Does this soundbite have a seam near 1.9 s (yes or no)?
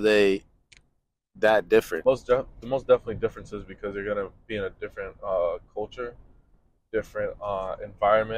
yes